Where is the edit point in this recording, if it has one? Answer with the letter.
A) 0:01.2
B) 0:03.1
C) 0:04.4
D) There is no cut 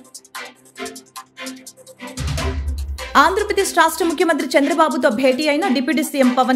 B